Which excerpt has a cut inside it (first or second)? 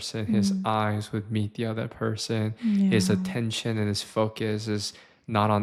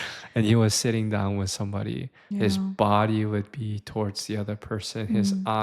second